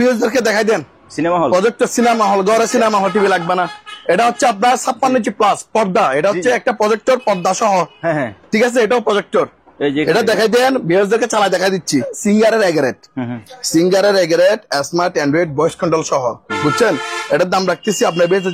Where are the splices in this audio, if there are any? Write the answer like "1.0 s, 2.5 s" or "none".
12.1 s

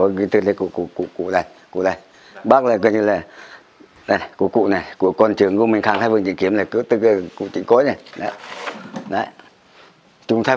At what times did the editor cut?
none

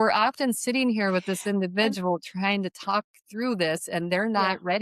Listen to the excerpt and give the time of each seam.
none

